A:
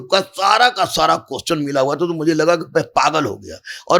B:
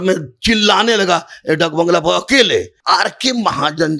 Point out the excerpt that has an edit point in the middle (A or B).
B